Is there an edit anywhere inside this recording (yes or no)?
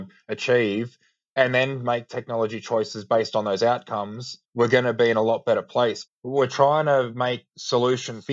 yes